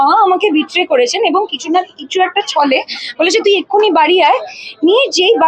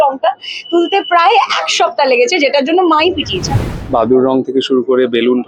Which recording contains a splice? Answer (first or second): second